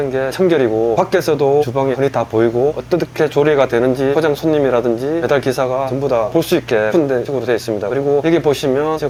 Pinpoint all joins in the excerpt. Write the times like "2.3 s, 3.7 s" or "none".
none